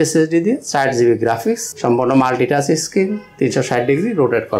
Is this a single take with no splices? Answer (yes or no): no